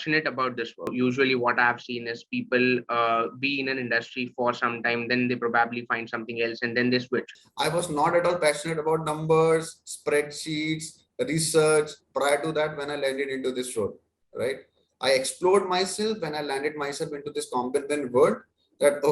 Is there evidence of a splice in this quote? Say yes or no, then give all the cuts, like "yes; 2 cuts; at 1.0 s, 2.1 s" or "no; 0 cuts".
yes; 2 cuts; at 0.9 s, 7.4 s